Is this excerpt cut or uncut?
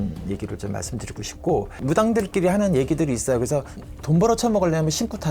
cut